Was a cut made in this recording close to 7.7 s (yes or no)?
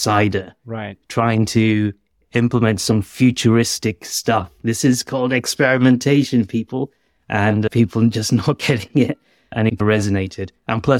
yes